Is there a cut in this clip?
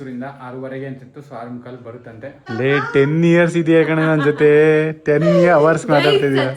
yes; 1 cut; at 2.4 s

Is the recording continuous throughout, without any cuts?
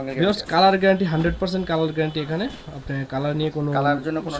yes; 0 cuts

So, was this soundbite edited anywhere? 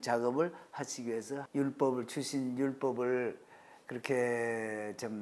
yes; 1 cut; at 1.4 s

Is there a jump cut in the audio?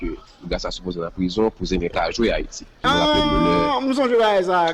yes; 1 cut; at 2.7 s

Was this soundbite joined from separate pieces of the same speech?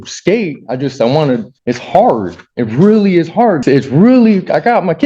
yes; 2 cuts; at 1.5 s, 3.6 s

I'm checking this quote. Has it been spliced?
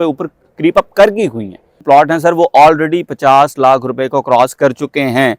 yes; 1 cut; at 1.8 s

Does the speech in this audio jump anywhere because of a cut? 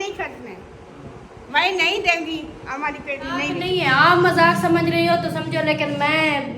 yes; 1 cut; at 3.6 s

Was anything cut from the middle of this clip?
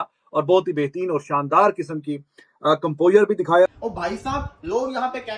yes; 1 cut; at 3.7 s

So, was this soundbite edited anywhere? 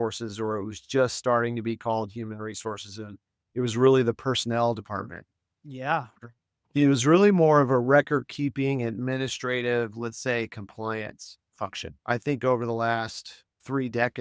yes; 1 cut; at 11.9 s

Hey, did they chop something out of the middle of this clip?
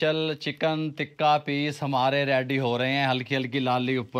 no; 0 cuts

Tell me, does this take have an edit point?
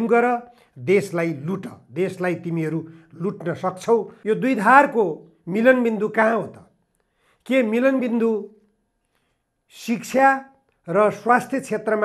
yes; 1 cut; at 4.1 s

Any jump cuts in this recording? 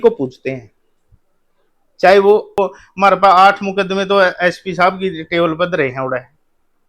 yes; 1 cut; at 2.6 s

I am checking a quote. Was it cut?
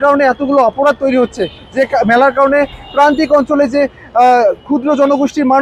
no; 0 cuts

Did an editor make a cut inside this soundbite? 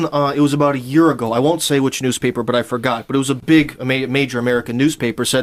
no; 0 cuts

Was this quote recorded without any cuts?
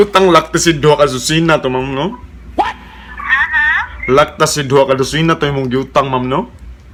yes; 0 cuts

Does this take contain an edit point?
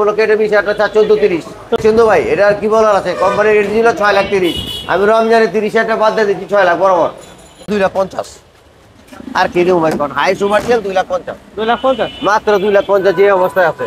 yes; 2 cuts; at 1.8 s, 7.6 s

